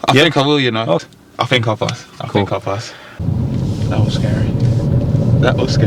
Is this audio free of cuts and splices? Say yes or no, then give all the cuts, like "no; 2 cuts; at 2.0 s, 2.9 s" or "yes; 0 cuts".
no; 2 cuts; at 1.0 s, 3.2 s